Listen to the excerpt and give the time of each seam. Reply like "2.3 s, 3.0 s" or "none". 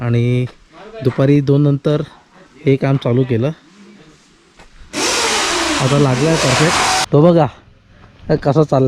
7.0 s